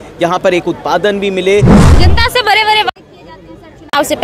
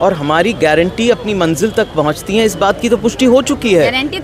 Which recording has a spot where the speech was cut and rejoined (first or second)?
first